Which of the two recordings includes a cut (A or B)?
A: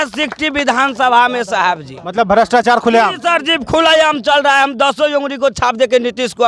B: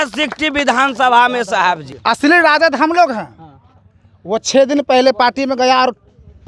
B